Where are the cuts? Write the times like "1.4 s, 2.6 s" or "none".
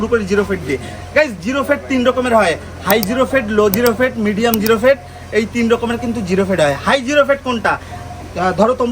none